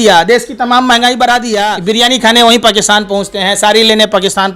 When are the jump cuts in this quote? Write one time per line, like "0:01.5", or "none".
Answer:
0:01.8